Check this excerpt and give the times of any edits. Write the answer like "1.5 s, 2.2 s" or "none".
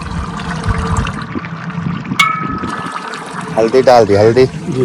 1.1 s